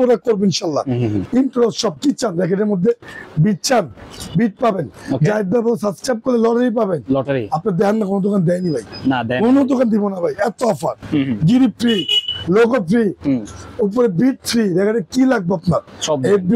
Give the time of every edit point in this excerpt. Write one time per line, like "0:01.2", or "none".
0:01.2